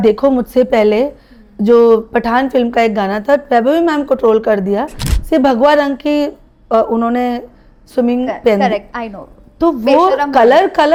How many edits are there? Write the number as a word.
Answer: zero